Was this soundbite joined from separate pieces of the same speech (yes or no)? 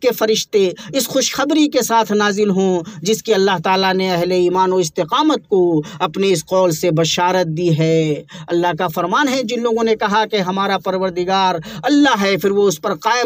no